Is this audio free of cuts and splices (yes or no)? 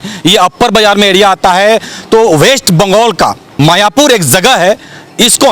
no